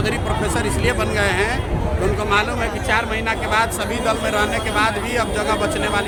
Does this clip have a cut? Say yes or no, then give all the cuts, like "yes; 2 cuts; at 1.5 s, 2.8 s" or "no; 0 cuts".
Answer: no; 0 cuts